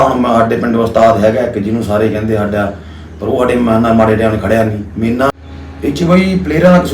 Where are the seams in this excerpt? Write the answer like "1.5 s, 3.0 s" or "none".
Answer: 5.3 s